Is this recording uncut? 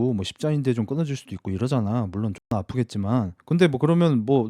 yes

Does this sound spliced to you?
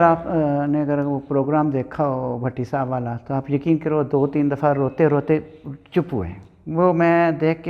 no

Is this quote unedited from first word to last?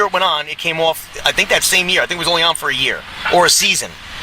no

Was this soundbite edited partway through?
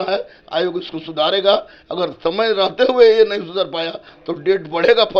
no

